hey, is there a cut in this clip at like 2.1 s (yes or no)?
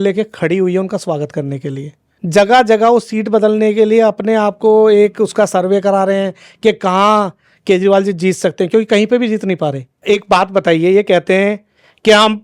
yes